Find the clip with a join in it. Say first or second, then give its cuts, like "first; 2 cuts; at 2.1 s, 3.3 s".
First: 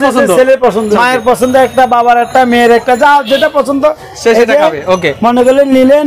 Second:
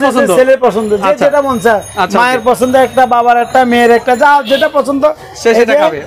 first; 1 cut; at 1.0 s